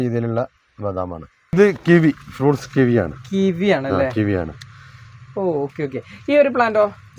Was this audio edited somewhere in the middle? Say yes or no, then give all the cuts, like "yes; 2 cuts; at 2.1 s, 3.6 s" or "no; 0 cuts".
yes; 1 cut; at 1.4 s